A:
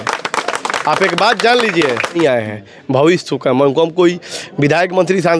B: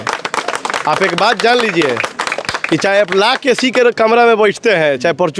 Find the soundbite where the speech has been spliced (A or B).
A